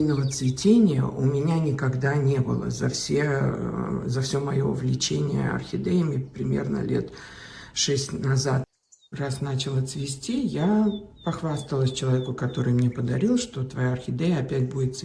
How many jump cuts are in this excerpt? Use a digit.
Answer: 1